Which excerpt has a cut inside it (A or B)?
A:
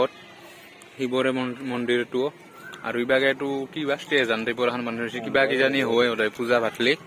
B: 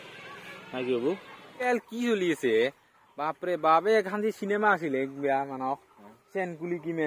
B